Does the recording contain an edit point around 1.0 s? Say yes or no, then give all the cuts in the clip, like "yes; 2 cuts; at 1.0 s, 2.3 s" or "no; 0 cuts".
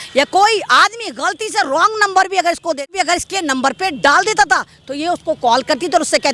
no; 1 cut; at 2.9 s